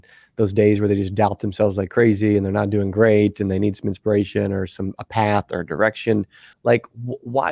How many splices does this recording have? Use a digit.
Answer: 1